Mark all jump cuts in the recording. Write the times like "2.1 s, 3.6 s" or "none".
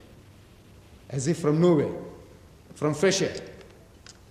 none